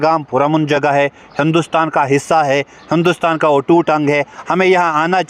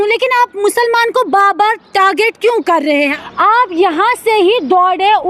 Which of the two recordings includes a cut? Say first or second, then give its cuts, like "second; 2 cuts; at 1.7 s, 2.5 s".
second; 1 cut; at 3.1 s